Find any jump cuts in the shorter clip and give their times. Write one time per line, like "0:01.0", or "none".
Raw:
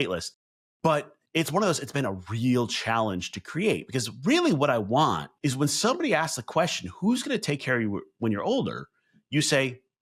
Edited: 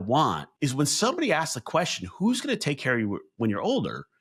none